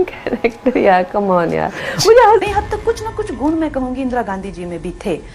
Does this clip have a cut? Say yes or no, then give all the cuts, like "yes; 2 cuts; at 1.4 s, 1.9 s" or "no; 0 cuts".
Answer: yes; 1 cut; at 2.4 s